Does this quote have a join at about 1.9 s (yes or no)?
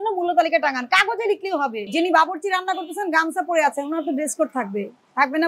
yes